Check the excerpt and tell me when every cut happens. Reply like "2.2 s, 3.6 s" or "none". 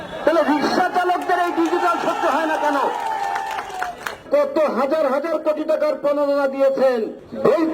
4.3 s